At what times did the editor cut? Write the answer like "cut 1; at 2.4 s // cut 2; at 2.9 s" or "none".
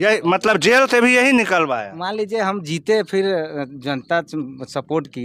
none